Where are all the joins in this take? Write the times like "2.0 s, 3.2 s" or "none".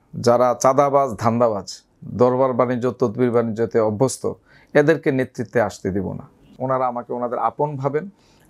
6.5 s